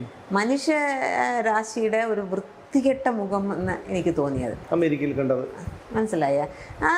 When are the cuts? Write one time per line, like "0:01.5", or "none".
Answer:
none